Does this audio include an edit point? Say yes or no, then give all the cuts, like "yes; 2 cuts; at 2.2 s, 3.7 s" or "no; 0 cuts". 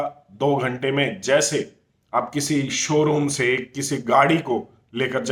no; 0 cuts